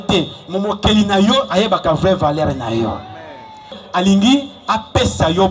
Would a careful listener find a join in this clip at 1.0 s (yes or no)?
no